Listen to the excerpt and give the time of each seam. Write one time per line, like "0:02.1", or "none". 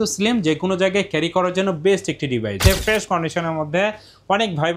0:02.6